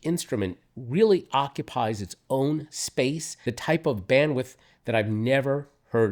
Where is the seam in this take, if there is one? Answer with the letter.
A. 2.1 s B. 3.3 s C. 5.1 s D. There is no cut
B